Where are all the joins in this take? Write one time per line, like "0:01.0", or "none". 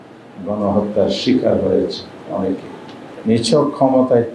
0:03.0